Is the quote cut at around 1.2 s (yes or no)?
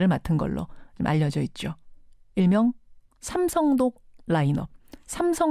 no